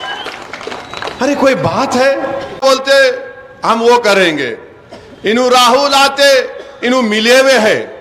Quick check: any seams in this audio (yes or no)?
yes